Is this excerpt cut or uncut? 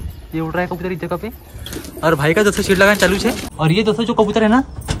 cut